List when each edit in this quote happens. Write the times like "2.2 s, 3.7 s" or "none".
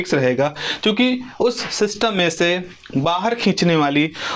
none